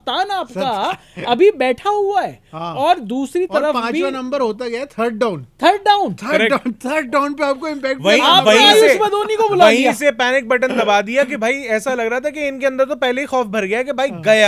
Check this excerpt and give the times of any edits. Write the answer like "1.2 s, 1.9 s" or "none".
none